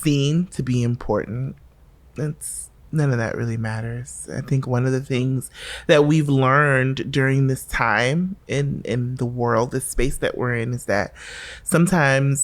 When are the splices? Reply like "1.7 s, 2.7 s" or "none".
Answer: none